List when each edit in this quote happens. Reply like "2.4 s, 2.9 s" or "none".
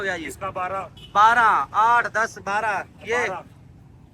none